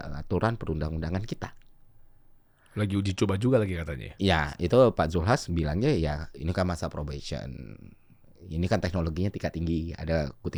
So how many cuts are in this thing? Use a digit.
0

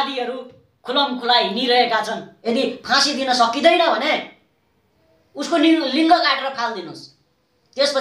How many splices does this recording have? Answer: 1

